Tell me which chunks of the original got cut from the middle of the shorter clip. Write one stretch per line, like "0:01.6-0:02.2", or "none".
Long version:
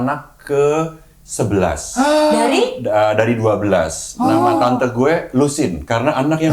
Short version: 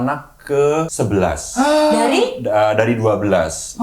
0:00.9-0:01.3